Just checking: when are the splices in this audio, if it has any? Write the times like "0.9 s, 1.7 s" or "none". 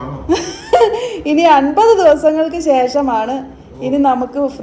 none